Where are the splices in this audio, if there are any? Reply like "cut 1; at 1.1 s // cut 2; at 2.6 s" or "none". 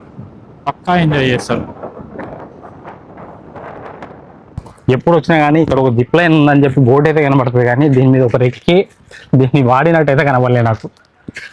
cut 1; at 4.4 s